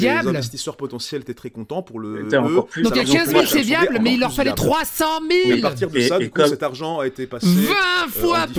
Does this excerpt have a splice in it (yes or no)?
no